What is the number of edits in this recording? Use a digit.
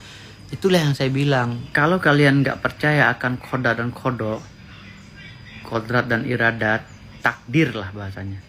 1